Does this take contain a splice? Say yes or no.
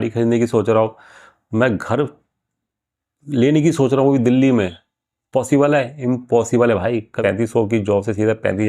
yes